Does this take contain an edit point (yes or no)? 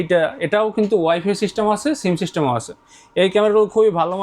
no